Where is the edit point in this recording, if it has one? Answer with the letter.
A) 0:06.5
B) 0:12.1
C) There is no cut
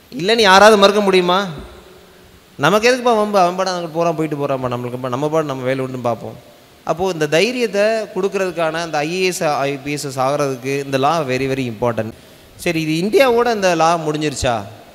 B